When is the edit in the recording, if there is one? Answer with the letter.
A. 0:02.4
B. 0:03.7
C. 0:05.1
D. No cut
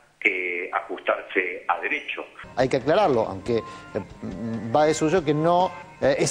A